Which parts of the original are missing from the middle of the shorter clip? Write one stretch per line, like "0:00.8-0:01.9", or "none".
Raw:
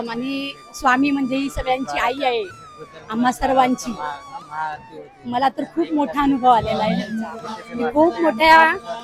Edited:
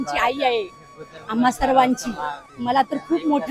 0:04.3-0:05.1